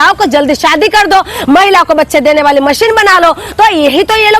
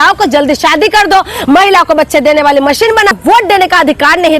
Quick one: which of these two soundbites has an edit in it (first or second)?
second